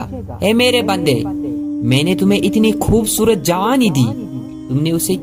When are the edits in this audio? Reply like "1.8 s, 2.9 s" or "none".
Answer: none